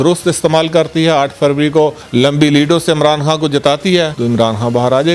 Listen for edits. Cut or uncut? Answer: cut